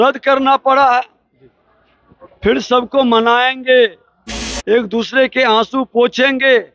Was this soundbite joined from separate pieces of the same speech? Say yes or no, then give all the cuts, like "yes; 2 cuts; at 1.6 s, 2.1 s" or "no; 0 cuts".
no; 0 cuts